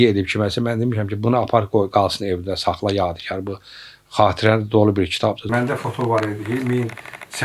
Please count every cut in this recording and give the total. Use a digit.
1